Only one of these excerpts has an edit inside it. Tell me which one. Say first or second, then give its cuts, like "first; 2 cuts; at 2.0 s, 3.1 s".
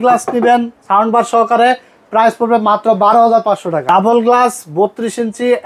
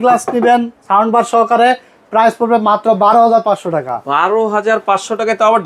first; 1 cut; at 3.8 s